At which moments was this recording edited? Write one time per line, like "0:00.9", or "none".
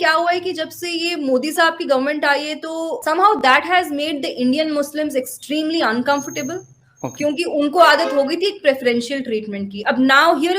0:02.9